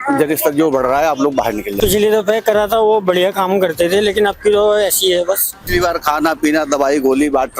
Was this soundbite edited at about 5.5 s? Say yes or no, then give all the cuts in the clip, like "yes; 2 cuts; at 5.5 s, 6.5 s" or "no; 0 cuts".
yes; 2 cuts; at 1.7 s, 5.5 s